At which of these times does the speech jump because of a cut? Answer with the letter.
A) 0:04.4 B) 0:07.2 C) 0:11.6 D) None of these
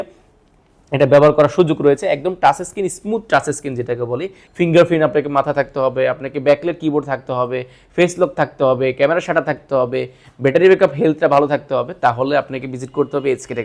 A